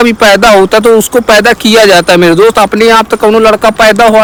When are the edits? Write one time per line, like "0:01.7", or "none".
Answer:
none